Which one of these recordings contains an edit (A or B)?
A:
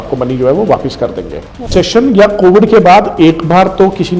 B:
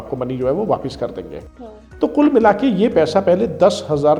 A